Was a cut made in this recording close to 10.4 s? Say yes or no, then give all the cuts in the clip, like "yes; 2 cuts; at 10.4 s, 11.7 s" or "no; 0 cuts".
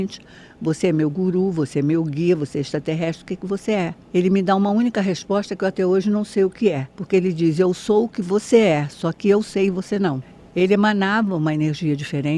yes; 2 cuts; at 6.9 s, 10.4 s